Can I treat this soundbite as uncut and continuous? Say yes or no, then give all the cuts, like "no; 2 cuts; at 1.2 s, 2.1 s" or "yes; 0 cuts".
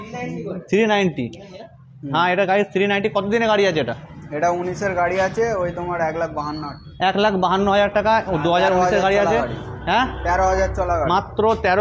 yes; 0 cuts